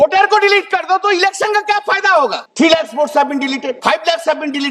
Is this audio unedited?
no; 2 cuts; at 2.4 s, 3.8 s

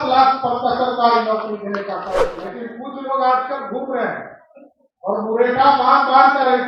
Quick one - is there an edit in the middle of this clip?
yes; 1 cut; at 2.3 s

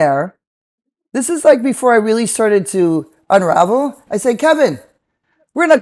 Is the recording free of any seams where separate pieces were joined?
yes; 0 cuts

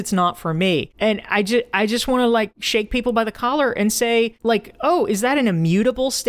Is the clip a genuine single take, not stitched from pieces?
no; 3 cuts; at 0.9 s, 2.6 s, 4.4 s

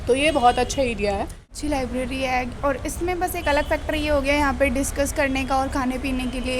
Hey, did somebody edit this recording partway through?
yes; 1 cut; at 1.5 s

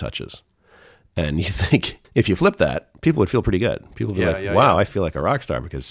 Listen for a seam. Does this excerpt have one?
yes; 1 cut; at 2.0 s

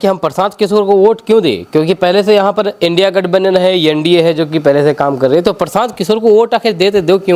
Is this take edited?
no; 0 cuts

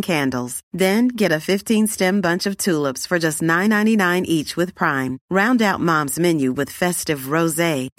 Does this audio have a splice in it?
no; 0 cuts

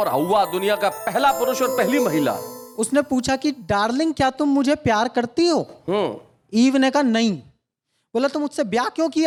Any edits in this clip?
no; 0 cuts

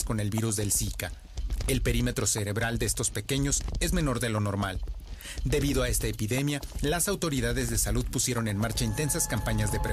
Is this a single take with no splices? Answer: no; 1 cut; at 3.7 s

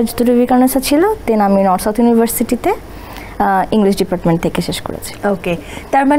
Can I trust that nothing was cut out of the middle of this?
yes; 0 cuts

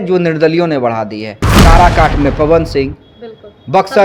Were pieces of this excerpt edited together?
no; 0 cuts

